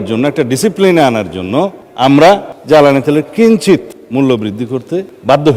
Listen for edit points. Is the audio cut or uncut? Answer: uncut